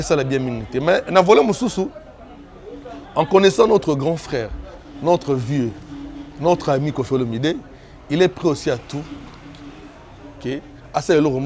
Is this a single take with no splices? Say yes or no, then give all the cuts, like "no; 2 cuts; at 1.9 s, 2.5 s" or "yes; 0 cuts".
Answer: yes; 0 cuts